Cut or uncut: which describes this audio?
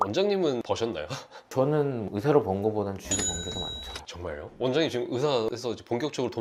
uncut